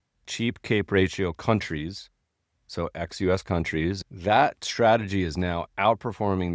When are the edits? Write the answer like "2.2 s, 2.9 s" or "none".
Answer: 4.0 s